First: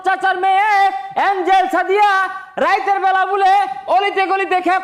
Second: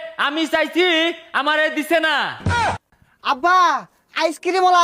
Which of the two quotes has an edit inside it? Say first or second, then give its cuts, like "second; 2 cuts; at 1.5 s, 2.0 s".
second; 1 cut; at 2.6 s